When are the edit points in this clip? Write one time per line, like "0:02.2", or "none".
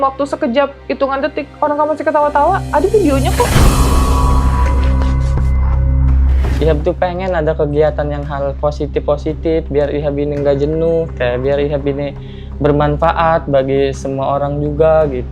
0:03.5
0:06.5